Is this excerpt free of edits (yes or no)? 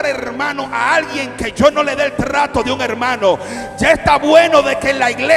yes